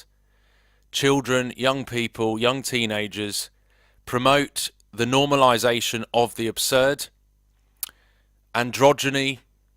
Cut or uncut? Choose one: cut